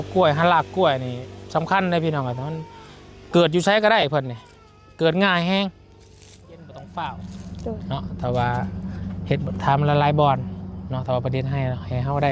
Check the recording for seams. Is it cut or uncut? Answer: cut